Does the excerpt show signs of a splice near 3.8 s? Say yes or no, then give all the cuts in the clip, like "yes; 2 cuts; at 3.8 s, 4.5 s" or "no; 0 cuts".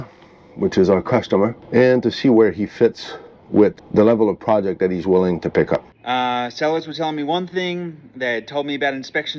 yes; 3 cuts; at 1.6 s, 3.8 s, 5.9 s